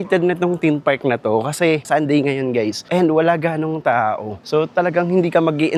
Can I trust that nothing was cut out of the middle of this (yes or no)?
yes